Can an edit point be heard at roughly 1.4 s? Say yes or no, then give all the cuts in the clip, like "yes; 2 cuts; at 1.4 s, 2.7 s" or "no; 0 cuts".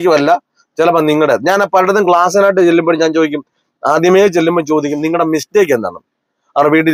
no; 0 cuts